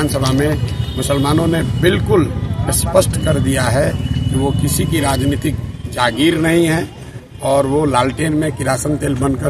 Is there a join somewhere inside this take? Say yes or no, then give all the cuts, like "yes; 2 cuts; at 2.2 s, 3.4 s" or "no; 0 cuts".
no; 0 cuts